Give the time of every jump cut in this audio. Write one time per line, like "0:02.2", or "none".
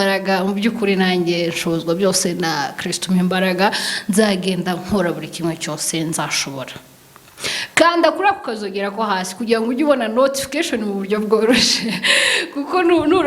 none